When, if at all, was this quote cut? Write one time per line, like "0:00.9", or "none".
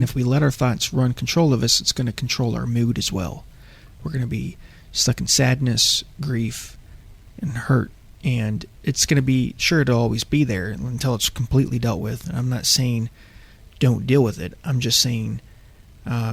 none